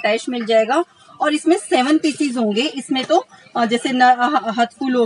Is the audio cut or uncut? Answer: uncut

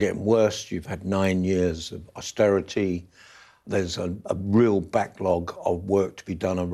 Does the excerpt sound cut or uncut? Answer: cut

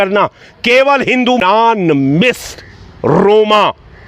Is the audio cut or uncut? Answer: cut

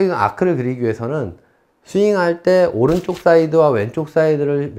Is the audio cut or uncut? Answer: uncut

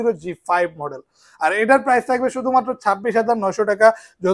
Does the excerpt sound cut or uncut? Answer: uncut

